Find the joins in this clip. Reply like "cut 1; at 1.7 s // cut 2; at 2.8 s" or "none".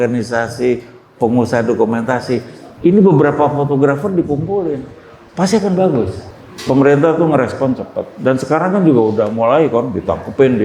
cut 1; at 6.2 s

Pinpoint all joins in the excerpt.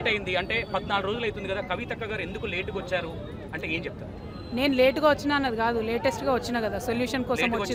none

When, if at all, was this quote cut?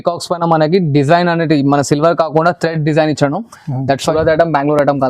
cut 1; at 4.1 s

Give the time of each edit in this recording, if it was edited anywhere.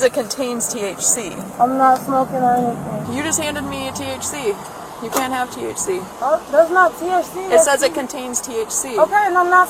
cut 1; at 3.0 s // cut 2; at 6.1 s

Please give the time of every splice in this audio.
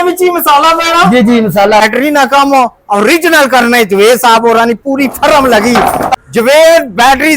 cut 1; at 1.8 s // cut 2; at 6.1 s

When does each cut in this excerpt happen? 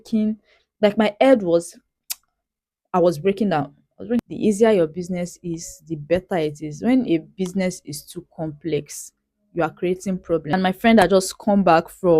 cut 1; at 4.2 s // cut 2; at 10.5 s

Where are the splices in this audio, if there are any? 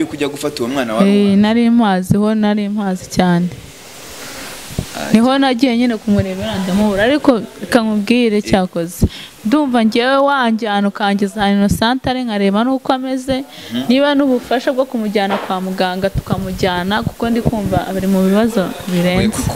none

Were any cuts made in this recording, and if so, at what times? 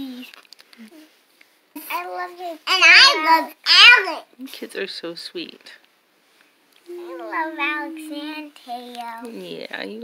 cut 1; at 1.8 s

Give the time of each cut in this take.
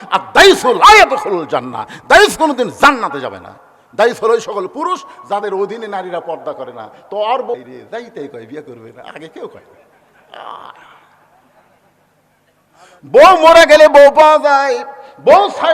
cut 1; at 7.5 s

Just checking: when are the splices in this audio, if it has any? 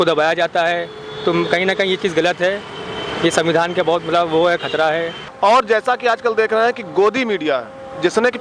cut 1; at 5.2 s

